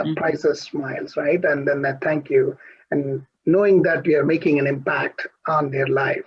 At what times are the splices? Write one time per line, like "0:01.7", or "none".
none